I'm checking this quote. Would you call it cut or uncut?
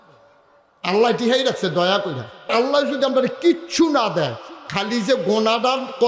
cut